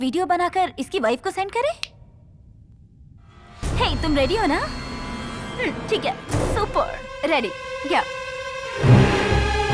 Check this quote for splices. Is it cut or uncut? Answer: uncut